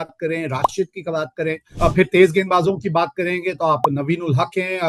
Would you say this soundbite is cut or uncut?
cut